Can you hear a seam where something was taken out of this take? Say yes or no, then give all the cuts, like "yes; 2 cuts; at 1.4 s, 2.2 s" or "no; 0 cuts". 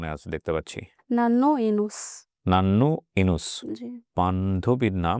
yes; 2 cuts; at 1.0 s, 4.1 s